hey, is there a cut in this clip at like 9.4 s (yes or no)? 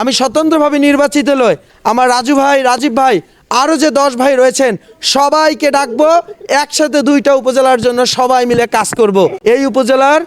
yes